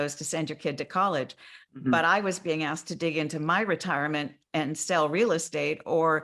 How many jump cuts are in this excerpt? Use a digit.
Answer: 1